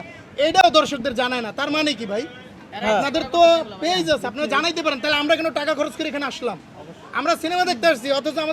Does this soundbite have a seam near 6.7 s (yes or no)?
no